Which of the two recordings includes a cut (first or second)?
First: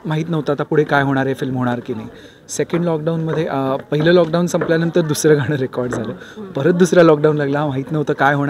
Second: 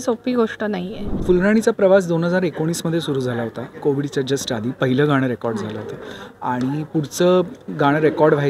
second